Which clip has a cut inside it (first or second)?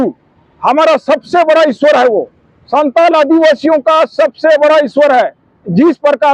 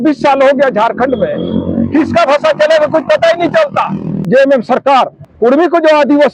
second